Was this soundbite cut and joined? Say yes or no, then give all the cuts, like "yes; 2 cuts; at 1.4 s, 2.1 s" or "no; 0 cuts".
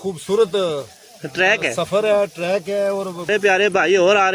yes; 1 cut; at 3.3 s